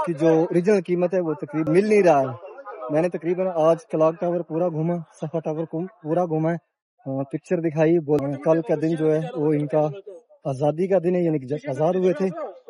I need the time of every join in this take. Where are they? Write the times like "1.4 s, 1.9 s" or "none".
1.7 s, 8.2 s